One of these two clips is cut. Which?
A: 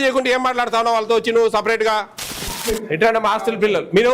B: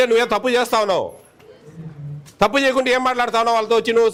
A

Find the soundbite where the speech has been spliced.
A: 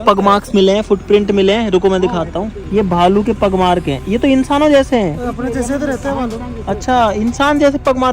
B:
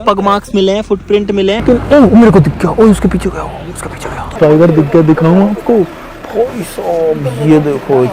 B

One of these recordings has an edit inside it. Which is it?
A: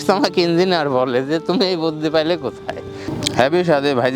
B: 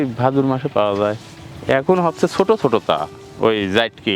A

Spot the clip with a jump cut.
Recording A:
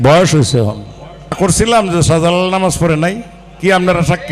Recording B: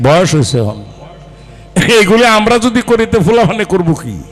A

